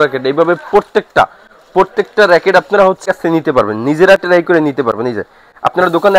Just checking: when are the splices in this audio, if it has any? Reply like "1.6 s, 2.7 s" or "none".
3.0 s